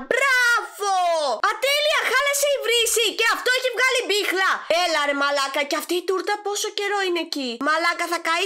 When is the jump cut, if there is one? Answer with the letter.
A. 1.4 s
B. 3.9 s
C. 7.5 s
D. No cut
A